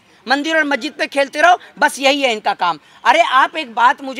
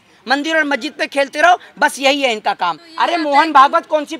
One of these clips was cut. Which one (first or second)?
second